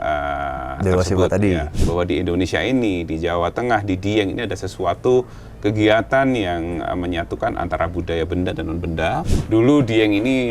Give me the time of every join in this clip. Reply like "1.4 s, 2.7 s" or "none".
1.8 s, 9.3 s